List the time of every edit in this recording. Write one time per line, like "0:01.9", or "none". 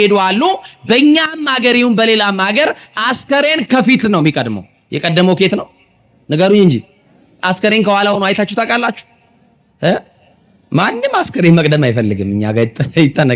none